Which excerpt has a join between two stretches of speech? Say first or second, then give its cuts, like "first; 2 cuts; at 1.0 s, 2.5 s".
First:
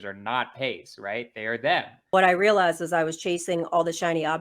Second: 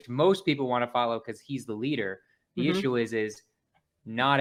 first; 1 cut; at 2.0 s